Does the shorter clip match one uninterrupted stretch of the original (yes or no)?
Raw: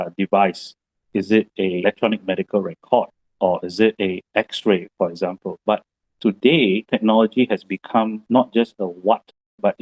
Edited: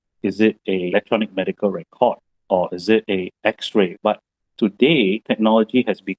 no